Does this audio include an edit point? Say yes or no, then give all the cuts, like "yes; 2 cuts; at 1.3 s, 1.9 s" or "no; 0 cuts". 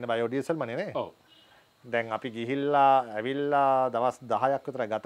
no; 0 cuts